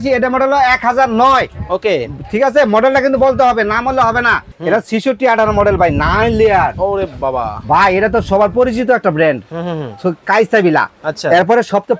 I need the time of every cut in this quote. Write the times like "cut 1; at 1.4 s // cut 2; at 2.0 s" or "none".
cut 1; at 4.5 s